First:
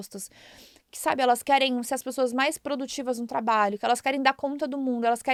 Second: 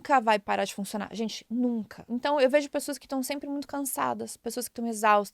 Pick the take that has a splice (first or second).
second